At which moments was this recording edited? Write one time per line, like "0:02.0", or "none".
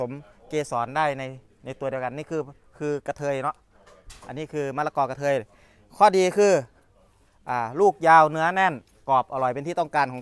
none